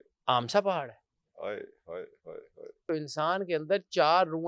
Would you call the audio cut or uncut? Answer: cut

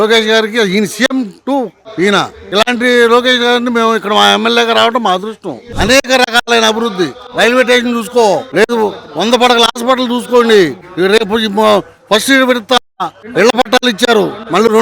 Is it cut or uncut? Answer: cut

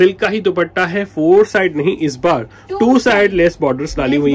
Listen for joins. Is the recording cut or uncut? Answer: uncut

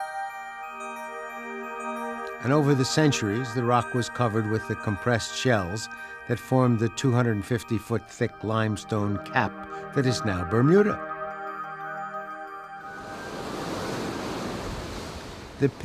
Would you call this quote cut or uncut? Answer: uncut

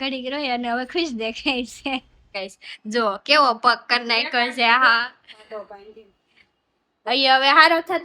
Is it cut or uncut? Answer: cut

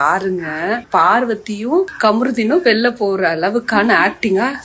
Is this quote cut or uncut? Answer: cut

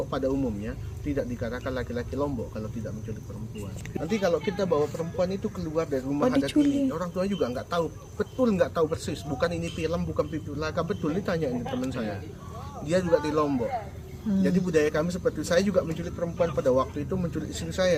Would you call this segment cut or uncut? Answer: uncut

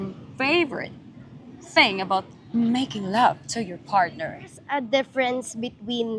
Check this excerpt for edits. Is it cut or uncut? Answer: cut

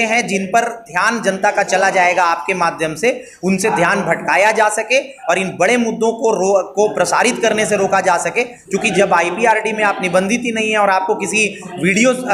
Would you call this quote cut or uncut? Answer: uncut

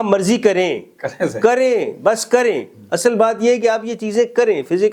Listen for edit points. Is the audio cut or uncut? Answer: uncut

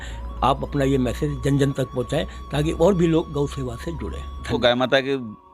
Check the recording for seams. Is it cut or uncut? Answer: cut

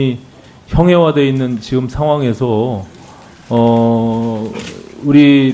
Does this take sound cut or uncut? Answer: uncut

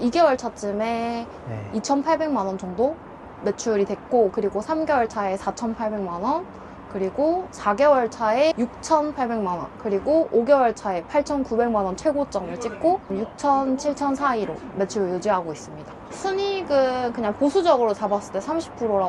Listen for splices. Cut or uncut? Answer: cut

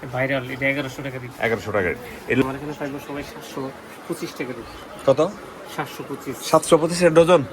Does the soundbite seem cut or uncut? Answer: cut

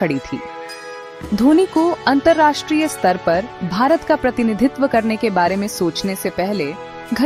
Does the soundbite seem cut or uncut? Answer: uncut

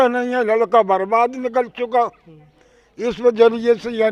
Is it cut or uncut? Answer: uncut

